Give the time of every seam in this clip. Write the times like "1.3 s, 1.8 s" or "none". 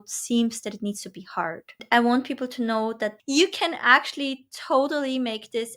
1.8 s, 3.2 s